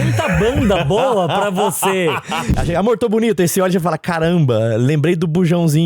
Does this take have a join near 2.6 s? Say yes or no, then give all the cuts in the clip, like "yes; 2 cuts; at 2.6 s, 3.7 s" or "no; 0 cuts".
yes; 1 cut; at 2.6 s